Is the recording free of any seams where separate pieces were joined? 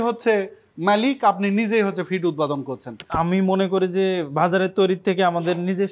no; 1 cut; at 3.0 s

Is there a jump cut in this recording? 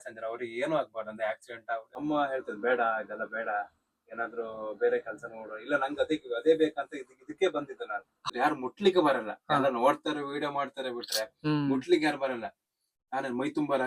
yes; 2 cuts; at 2.0 s, 8.3 s

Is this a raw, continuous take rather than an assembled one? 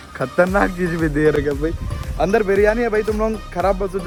yes; 0 cuts

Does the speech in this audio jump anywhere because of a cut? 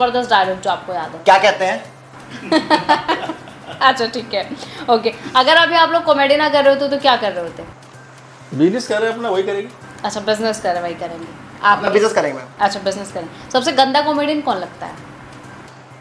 no; 0 cuts

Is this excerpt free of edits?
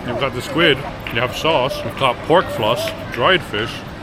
no; 3 cuts; at 0.9 s, 1.9 s, 3.0 s

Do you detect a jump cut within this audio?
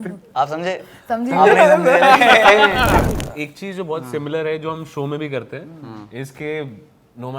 yes; 1 cut; at 3.1 s

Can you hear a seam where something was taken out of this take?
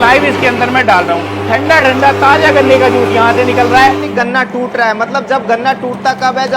yes; 2 cuts; at 1.3 s, 4.0 s

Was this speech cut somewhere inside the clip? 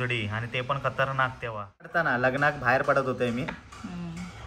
yes; 1 cut; at 2.1 s

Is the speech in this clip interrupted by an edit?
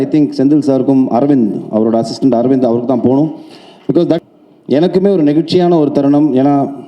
yes; 1 cut; at 4.2 s

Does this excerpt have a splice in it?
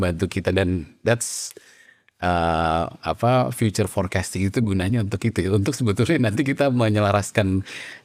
no; 0 cuts

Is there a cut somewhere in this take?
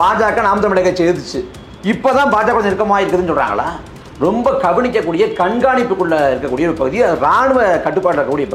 yes; 1 cut; at 4.0 s

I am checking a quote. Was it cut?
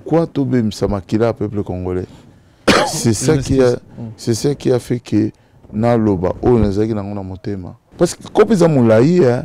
yes; 1 cut; at 7.8 s

